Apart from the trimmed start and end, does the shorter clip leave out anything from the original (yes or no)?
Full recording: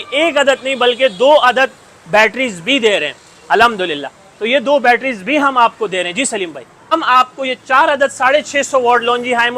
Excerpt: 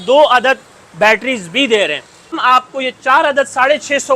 yes